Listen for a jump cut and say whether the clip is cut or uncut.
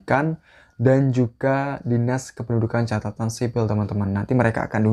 uncut